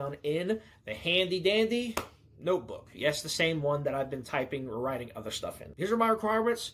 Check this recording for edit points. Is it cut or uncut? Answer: uncut